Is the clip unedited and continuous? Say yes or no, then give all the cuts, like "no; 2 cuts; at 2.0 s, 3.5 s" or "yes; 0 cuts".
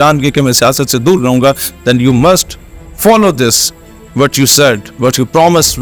yes; 0 cuts